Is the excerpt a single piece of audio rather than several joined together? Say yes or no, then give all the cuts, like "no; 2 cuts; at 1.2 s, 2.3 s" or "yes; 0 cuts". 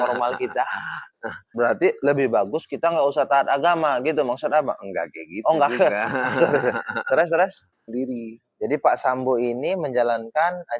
no; 2 cuts; at 1.5 s, 7.9 s